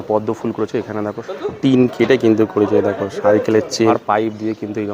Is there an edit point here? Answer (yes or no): yes